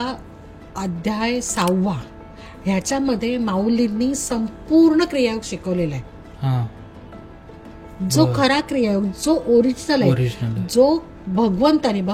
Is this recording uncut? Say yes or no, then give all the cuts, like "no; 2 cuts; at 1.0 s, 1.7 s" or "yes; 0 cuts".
yes; 0 cuts